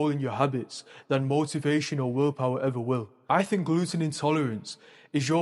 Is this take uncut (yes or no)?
no